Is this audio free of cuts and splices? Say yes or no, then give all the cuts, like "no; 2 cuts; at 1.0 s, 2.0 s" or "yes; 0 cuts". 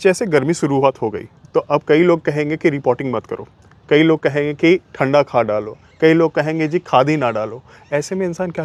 yes; 0 cuts